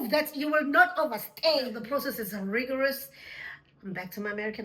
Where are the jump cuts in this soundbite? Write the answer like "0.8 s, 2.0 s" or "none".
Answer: 1.8 s

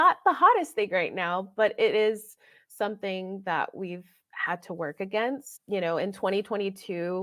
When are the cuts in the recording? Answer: 5.5 s

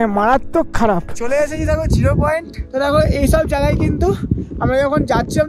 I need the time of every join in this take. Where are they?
1.1 s, 2.6 s

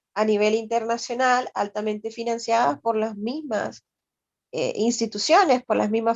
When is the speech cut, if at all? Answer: none

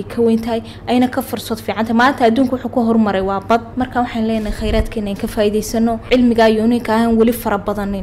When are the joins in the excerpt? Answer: 3.7 s, 6.0 s

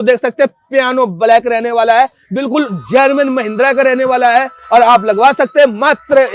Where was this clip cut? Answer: none

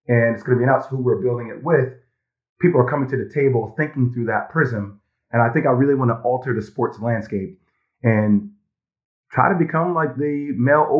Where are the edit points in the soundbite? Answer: none

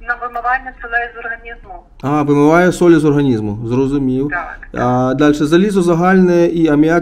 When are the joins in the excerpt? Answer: none

